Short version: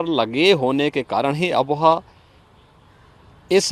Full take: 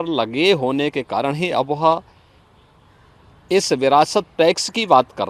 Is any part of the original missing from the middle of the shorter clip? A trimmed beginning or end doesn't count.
no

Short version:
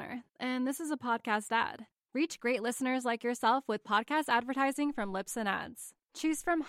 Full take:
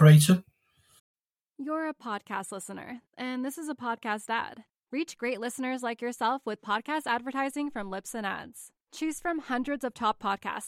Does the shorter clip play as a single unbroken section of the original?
yes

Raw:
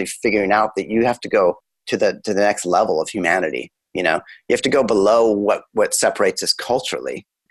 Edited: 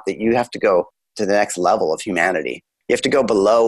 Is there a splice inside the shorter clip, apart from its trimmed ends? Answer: yes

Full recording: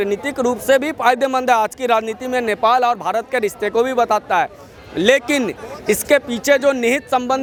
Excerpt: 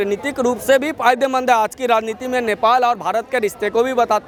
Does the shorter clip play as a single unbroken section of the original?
yes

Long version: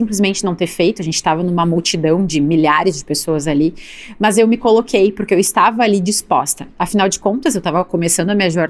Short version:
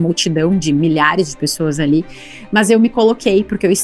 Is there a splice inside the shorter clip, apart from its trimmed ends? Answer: no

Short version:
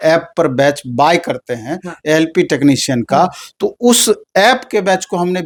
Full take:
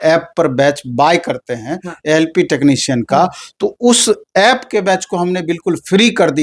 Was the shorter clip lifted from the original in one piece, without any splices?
yes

